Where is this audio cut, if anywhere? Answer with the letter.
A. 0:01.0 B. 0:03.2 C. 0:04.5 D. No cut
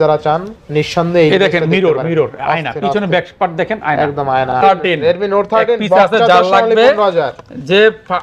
C